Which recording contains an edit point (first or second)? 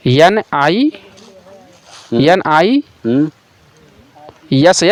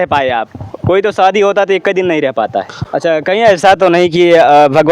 second